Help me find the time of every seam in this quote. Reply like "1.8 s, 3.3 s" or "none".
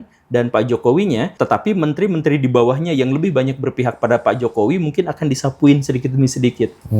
1.3 s